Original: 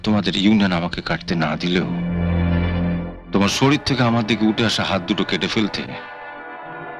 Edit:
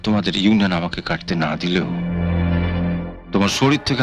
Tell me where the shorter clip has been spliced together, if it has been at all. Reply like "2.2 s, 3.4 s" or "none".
none